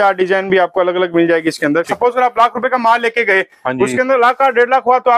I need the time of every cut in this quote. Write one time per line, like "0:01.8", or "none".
0:01.9